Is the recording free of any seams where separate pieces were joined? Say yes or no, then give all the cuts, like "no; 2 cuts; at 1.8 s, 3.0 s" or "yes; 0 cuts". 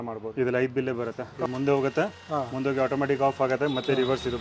no; 1 cut; at 1.3 s